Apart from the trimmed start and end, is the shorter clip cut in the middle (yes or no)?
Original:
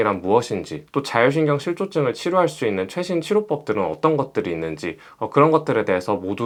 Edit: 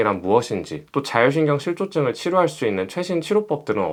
no